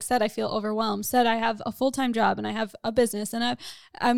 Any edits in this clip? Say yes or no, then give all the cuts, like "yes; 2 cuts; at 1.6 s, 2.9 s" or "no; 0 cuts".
no; 0 cuts